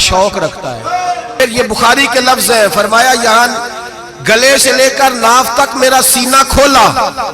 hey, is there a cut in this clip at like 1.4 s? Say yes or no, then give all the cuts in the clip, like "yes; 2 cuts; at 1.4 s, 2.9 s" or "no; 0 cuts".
yes; 1 cut; at 1.4 s